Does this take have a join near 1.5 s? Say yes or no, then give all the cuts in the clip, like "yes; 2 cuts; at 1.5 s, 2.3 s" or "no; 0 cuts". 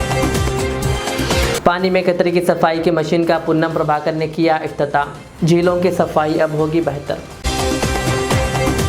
no; 0 cuts